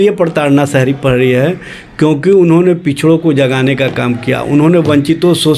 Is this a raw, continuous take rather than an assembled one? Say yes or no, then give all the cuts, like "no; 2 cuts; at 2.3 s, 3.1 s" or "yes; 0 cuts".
yes; 0 cuts